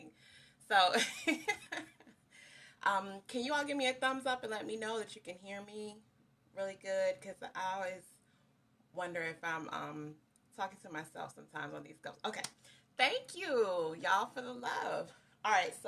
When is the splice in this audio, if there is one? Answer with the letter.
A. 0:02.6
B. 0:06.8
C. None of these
B